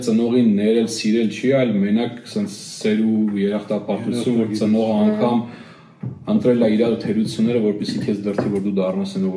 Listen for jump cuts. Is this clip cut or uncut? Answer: uncut